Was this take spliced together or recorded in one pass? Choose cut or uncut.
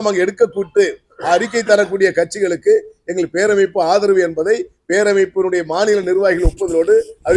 uncut